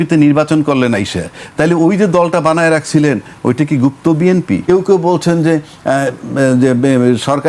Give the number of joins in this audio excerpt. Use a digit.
1